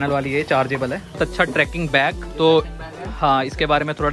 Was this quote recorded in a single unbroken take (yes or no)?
no